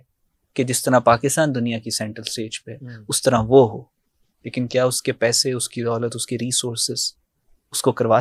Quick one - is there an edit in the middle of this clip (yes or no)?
no